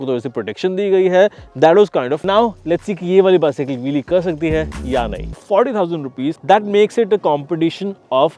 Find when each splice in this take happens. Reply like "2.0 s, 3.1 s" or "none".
2.2 s, 5.4 s